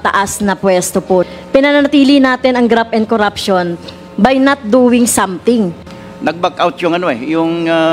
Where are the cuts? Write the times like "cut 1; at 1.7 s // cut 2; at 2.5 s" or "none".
cut 1; at 1.2 s // cut 2; at 5.9 s